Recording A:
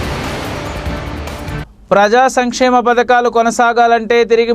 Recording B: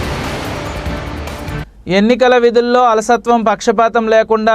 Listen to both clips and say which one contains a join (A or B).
A